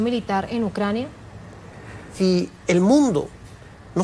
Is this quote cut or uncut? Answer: cut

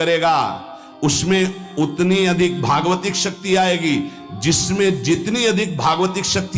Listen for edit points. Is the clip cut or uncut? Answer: uncut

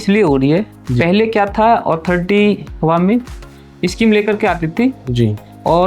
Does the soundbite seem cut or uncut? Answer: cut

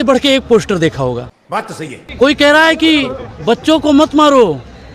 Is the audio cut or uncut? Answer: uncut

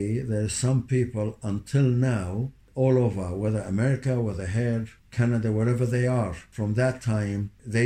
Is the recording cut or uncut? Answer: uncut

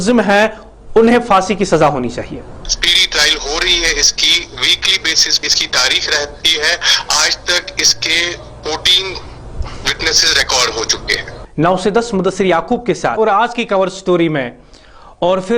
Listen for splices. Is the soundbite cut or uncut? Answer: cut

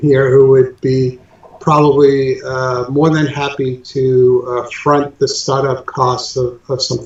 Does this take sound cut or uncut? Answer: uncut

